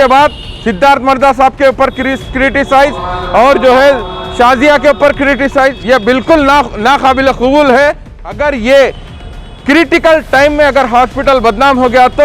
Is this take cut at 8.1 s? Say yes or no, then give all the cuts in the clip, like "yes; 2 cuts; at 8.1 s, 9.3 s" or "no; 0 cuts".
yes; 1 cut; at 8.1 s